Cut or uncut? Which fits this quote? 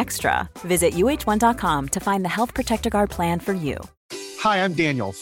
uncut